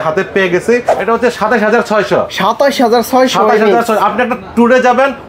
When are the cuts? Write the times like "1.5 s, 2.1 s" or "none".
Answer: 0.9 s